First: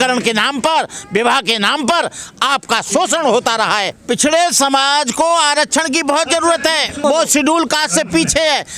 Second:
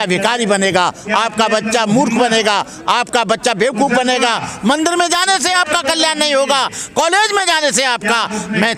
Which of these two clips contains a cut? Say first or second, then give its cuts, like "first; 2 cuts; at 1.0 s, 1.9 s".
first; 2 cuts; at 3.9 s, 7.0 s